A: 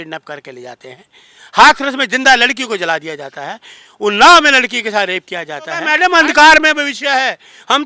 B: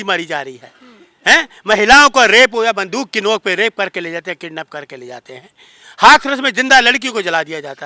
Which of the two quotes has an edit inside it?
A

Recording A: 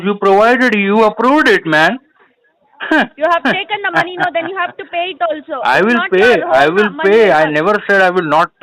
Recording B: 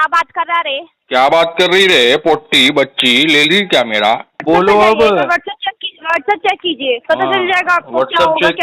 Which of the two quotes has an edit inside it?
B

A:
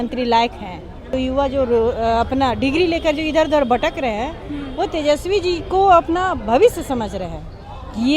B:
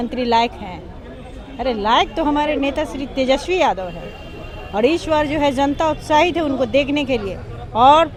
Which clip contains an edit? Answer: A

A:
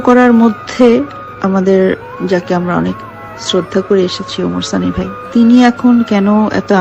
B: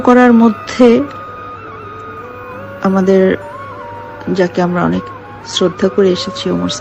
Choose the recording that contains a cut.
A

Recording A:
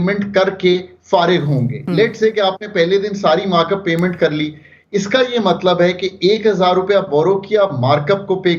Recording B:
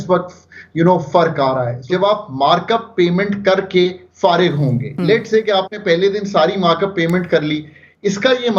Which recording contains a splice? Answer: B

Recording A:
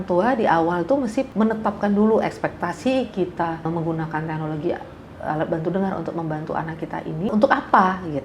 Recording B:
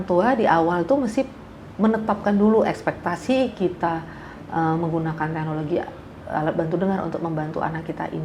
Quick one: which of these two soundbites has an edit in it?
A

